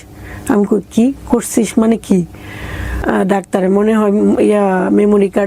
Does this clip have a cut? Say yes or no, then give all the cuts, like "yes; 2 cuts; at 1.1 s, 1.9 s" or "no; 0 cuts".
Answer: yes; 1 cut; at 3.0 s